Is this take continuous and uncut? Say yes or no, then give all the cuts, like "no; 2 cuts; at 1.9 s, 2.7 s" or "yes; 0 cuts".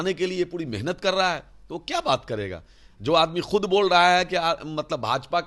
yes; 0 cuts